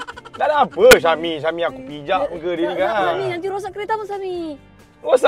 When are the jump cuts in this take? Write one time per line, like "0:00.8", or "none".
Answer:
none